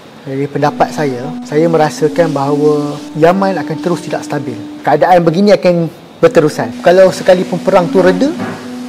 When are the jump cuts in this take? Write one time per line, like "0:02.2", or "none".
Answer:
0:01.3
0:03.0
0:04.6
0:06.7

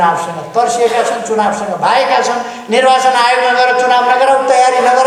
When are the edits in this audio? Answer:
none

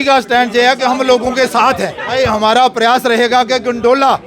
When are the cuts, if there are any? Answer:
0:02.0

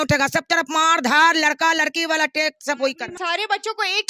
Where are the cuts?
0:03.2

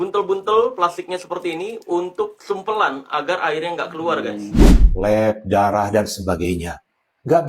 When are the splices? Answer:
0:04.8

